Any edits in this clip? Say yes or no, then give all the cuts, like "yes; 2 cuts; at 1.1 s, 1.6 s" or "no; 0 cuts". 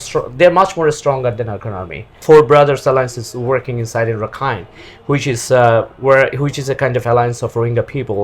yes; 1 cut; at 2.2 s